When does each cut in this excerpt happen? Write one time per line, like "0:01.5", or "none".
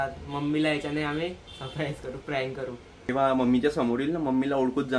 0:03.1